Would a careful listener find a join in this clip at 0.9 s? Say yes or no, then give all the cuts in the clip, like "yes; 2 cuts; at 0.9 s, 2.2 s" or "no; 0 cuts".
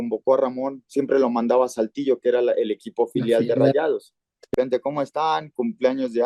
no; 1 cut; at 4.5 s